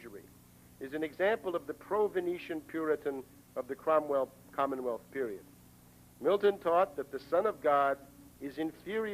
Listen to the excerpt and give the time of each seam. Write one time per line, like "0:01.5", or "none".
0:02.9

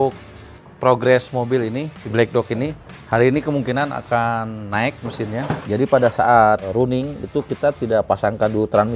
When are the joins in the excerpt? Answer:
0:02.0
0:05.6
0:06.7

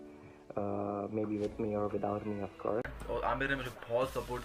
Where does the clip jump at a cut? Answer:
0:03.0

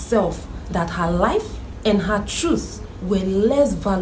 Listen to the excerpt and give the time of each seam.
0:01.6

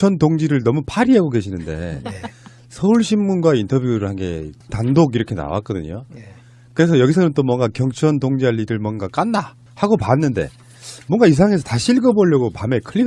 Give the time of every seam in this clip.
none

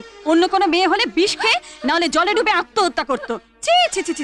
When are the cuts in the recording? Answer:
none

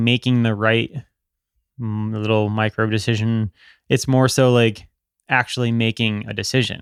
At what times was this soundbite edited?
none

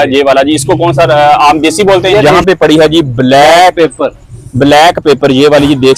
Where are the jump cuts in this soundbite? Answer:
0:02.2

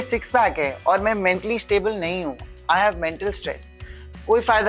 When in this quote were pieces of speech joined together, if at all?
none

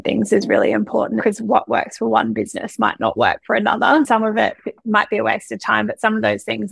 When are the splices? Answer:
0:01.2
0:04.1

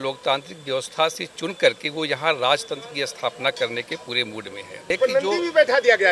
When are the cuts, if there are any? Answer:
0:05.0

